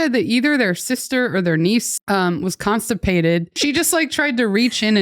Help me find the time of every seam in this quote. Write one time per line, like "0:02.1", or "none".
0:01.9
0:03.5